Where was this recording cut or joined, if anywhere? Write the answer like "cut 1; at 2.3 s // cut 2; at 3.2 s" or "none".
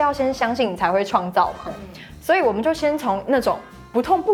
none